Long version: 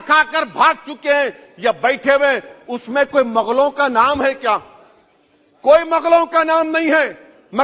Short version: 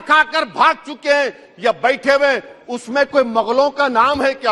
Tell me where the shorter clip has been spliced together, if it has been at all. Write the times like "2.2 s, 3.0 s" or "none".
none

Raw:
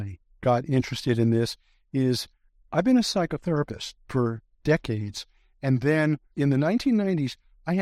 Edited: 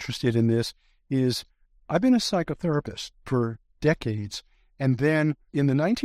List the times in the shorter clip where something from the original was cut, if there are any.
none

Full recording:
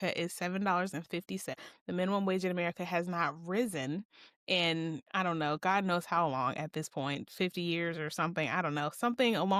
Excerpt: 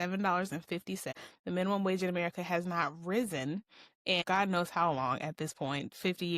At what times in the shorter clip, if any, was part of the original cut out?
4.2 s

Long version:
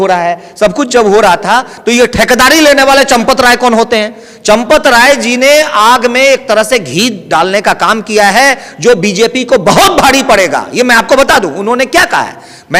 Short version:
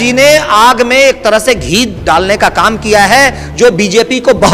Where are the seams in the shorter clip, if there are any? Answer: none

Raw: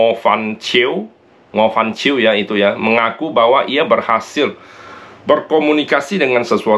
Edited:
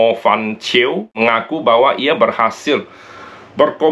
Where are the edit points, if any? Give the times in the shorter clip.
1.1 s

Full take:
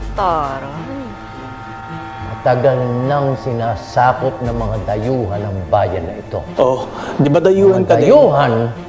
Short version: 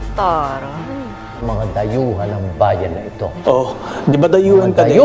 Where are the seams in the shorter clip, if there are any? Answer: 1.4 s

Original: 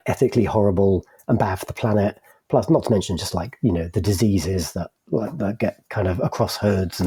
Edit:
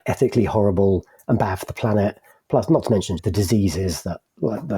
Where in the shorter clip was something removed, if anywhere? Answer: 3.2 s

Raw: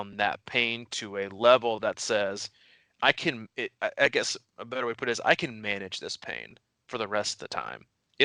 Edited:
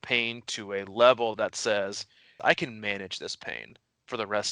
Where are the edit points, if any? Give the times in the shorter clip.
2.4 s

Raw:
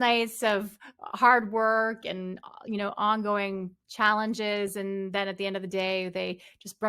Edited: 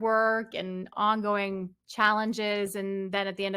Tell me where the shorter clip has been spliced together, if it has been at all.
0.9 s

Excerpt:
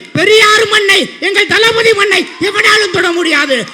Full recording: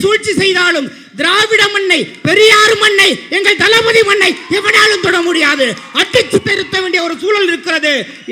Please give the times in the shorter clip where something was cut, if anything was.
none

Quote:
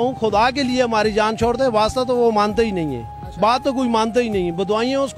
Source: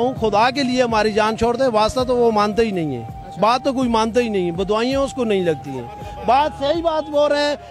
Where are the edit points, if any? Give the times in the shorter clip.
none

